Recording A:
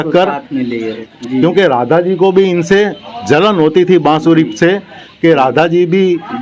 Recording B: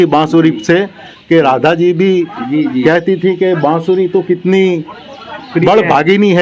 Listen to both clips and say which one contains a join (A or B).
A